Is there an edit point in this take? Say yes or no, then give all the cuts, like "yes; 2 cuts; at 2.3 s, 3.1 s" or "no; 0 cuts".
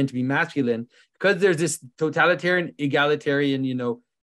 yes; 1 cut; at 1.8 s